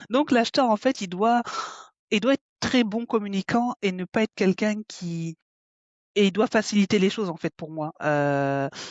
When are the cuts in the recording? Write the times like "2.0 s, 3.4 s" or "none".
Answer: none